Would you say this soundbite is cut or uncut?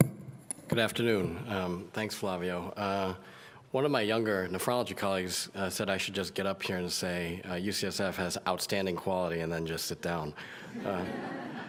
uncut